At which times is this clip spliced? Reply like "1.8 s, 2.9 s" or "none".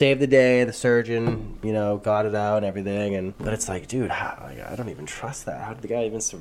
none